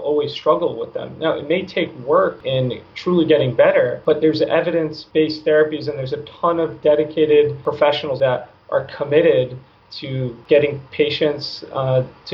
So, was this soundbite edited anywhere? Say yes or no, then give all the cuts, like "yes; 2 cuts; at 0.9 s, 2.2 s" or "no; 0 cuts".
yes; 5 cuts; at 2.4 s, 4.0 s, 5.0 s, 8.1 s, 10.3 s